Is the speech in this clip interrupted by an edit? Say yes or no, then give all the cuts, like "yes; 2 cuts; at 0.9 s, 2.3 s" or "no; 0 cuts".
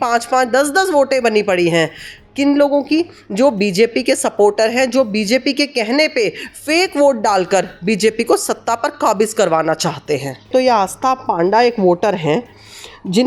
yes; 1 cut; at 10.5 s